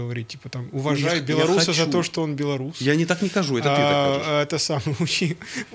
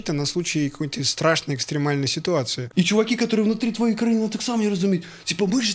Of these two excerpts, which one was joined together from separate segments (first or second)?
second